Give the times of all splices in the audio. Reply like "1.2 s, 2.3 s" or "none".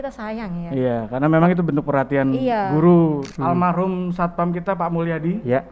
3.3 s

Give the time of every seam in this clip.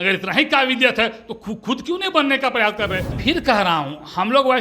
3.1 s

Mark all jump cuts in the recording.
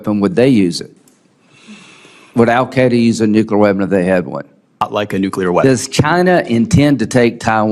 1.6 s, 4.9 s

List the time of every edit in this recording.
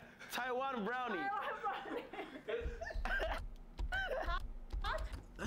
none

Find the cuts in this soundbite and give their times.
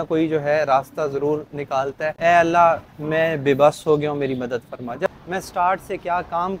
2.1 s, 5.1 s

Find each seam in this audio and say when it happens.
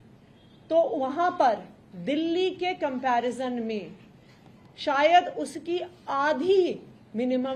none

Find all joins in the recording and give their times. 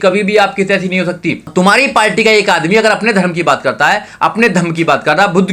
1.4 s

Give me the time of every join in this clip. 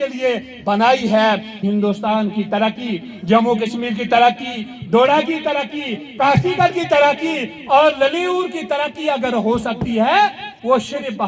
1.5 s

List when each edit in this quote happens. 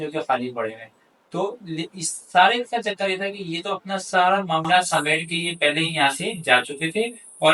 none

